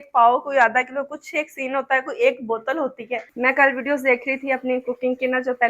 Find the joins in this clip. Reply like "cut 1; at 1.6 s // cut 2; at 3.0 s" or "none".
cut 1; at 3.3 s